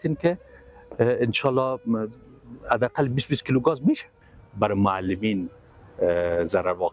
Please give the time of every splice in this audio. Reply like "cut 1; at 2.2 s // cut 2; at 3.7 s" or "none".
cut 1; at 4.2 s

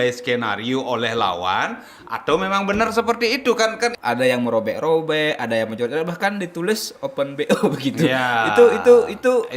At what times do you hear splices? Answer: cut 1; at 4.0 s

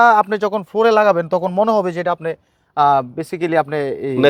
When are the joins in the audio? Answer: none

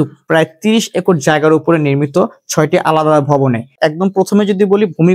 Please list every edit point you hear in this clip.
cut 1; at 3.8 s

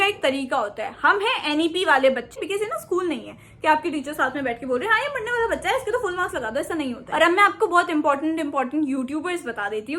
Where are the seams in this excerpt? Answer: cut 1; at 2.4 s // cut 2; at 7.0 s

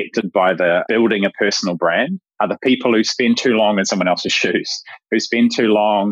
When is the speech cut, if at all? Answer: cut 1; at 0.8 s // cut 2; at 2.2 s // cut 3; at 3.1 s

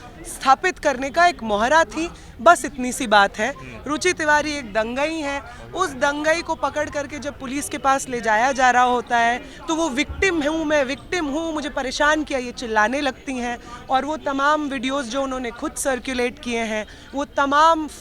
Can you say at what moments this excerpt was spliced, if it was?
none

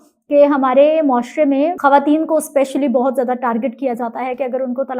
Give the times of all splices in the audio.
cut 1; at 1.8 s

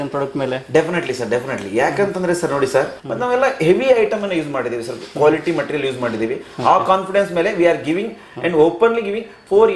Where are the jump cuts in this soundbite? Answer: cut 1; at 3.0 s

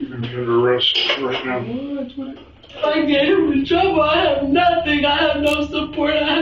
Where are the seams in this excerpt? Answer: cut 1; at 2.8 s

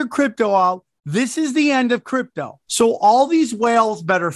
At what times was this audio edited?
cut 1; at 2.6 s

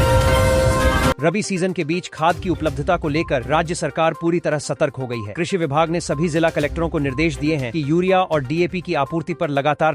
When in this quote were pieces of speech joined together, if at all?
cut 1; at 1.2 s

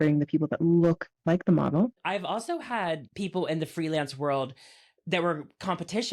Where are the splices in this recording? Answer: cut 1; at 2.0 s // cut 2; at 3.1 s

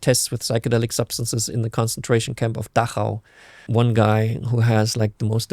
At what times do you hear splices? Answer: cut 1; at 3.6 s

